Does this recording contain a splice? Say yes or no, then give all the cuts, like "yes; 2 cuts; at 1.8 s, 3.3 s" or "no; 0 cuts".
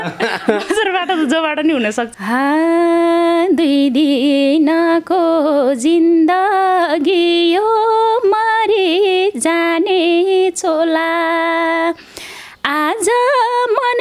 yes; 1 cut; at 2.1 s